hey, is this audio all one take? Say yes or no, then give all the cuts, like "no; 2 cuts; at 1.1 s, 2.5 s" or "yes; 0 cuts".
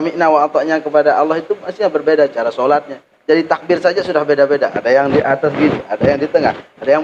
yes; 0 cuts